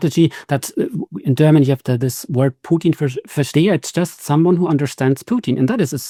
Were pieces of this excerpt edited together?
no; 0 cuts

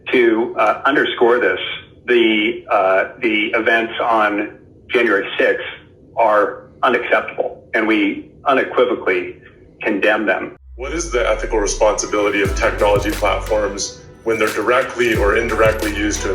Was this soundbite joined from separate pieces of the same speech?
yes; 1 cut; at 11.0 s

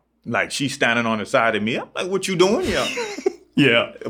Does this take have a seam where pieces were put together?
no; 0 cuts

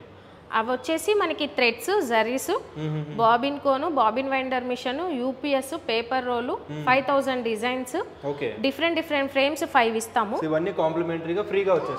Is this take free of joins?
yes; 0 cuts

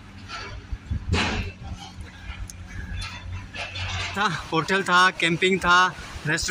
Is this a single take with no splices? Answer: no; 1 cut; at 4.2 s

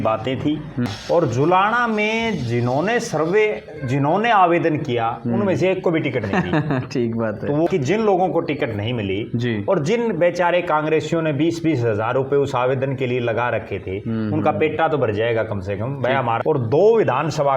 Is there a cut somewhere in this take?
yes; 3 cuts; at 0.9 s, 7.7 s, 16.4 s

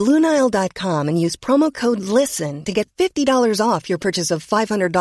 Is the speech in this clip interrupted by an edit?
no; 0 cuts

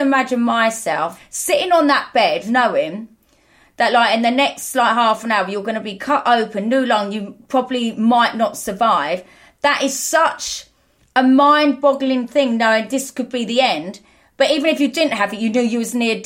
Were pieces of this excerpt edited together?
yes; 2 cuts; at 1.2 s, 2.5 s

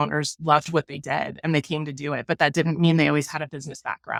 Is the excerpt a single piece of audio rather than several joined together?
yes; 0 cuts

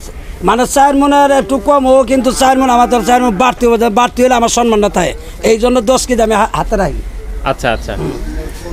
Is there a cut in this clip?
no; 0 cuts

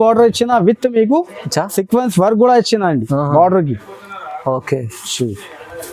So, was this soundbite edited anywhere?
no; 0 cuts

